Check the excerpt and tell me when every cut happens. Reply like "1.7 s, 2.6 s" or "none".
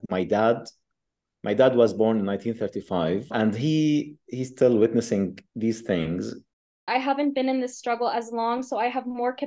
6.7 s